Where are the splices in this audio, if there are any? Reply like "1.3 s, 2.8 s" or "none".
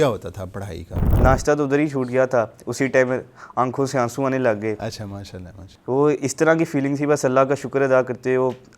1.1 s